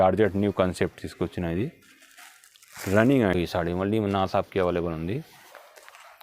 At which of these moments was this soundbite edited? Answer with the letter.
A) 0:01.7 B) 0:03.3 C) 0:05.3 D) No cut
B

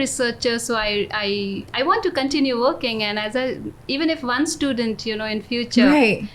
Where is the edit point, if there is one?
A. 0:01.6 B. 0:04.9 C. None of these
C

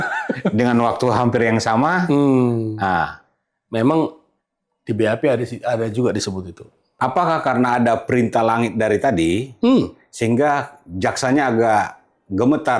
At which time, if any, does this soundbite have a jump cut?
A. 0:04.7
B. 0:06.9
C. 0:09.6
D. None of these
B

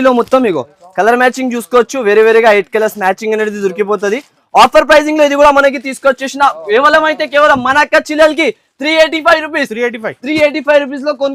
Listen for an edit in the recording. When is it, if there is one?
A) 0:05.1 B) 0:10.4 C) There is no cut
C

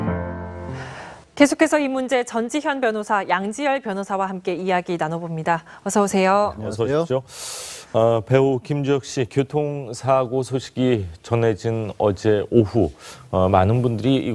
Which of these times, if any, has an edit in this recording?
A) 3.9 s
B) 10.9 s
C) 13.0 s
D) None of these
D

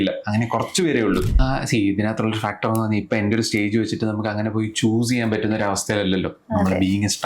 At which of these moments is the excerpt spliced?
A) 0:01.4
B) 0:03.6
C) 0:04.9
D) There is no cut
A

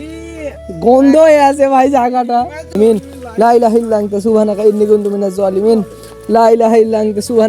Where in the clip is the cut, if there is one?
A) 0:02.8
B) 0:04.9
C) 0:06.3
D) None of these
A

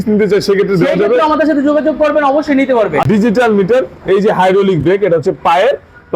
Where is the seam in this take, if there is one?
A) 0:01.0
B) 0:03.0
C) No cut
B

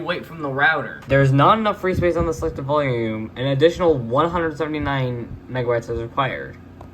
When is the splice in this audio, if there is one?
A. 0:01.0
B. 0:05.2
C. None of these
A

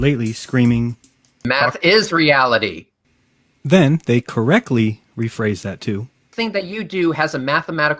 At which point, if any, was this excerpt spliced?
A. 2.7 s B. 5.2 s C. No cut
A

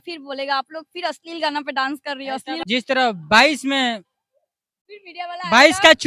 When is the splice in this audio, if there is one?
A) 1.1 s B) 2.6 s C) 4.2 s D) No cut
B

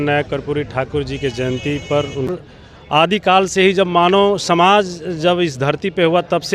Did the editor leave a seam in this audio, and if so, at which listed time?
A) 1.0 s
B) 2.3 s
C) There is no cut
B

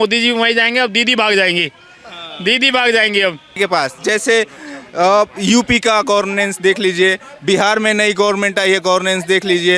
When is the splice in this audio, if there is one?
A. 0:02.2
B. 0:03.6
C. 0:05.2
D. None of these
B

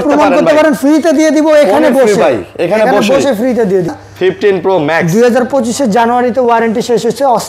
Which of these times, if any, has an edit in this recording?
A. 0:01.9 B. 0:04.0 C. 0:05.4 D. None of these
B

